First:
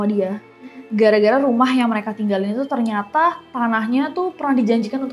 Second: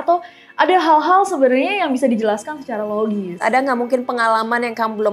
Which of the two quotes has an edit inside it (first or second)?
second